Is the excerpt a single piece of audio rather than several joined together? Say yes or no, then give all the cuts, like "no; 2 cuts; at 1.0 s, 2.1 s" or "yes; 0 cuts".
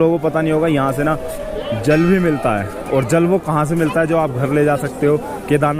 yes; 0 cuts